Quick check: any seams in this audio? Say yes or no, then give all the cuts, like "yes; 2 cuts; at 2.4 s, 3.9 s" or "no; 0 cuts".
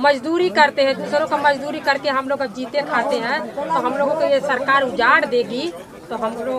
no; 0 cuts